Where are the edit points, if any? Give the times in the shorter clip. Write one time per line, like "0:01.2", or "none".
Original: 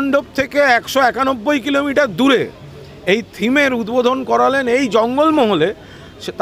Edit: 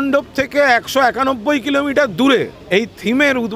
0:02.6